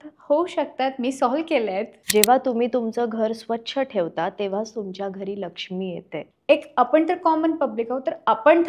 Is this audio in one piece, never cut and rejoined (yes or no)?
no